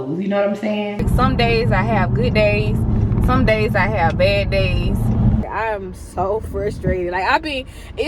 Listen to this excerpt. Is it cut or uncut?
cut